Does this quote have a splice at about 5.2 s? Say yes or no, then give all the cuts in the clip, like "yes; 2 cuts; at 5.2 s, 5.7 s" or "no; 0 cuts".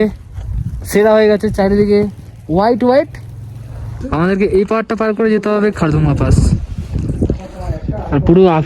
no; 1 cut; at 4.0 s